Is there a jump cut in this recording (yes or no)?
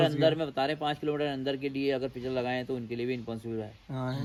no